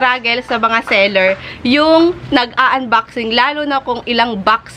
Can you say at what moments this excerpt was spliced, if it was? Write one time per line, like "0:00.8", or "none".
none